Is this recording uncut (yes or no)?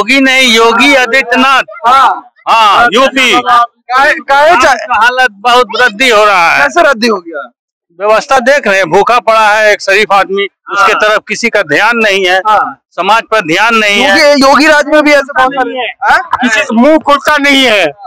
yes